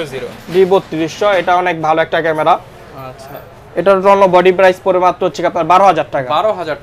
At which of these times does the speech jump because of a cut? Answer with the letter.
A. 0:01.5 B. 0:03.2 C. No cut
C